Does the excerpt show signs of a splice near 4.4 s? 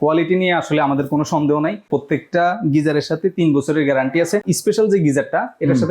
yes; 2 cuts; at 1.9 s, 4.4 s

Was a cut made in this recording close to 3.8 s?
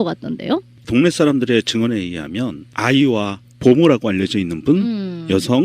yes; 1 cut; at 3.8 s

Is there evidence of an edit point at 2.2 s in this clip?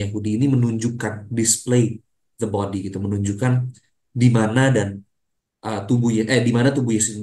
no; 0 cuts

